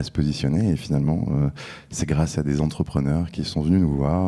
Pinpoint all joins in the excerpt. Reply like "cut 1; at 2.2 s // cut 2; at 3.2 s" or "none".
none